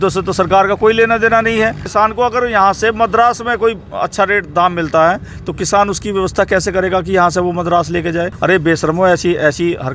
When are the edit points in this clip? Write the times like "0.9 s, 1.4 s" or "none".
1.8 s, 8.3 s